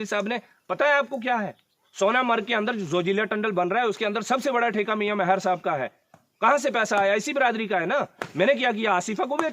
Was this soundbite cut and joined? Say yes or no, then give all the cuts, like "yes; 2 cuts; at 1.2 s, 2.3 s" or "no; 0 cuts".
no; 0 cuts